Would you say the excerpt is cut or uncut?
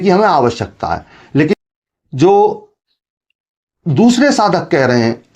cut